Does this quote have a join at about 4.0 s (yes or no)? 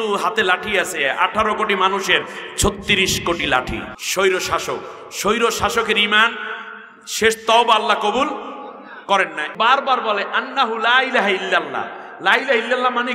yes